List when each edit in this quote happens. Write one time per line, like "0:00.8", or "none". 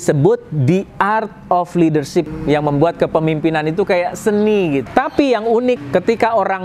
0:02.3
0:04.9
0:05.8